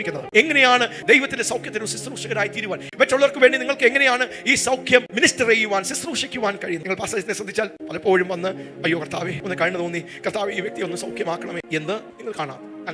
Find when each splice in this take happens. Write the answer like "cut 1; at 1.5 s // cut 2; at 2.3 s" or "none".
cut 1; at 1.0 s // cut 2; at 2.9 s // cut 3; at 6.8 s